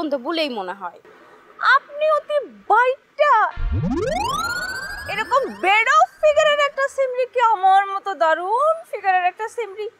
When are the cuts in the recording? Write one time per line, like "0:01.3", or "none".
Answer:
0:01.0